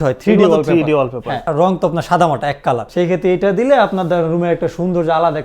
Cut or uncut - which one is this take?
cut